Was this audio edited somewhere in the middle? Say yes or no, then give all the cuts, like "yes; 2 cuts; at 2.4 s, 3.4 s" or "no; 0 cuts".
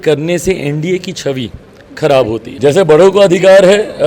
yes; 1 cut; at 2.5 s